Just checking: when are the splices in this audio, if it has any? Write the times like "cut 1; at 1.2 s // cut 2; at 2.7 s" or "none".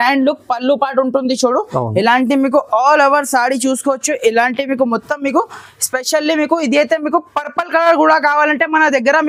none